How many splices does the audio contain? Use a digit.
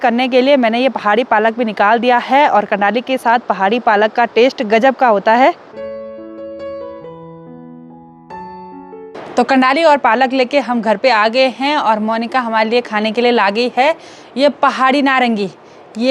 0